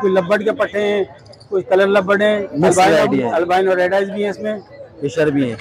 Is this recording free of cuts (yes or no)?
yes